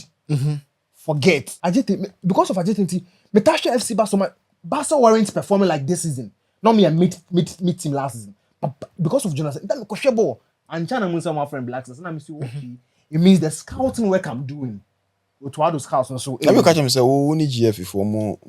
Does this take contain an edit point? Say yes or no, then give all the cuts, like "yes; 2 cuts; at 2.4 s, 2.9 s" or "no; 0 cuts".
yes; 1 cut; at 1.5 s